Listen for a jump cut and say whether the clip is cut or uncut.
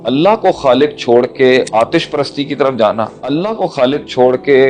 cut